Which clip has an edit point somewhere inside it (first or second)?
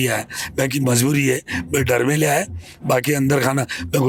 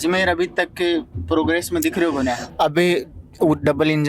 second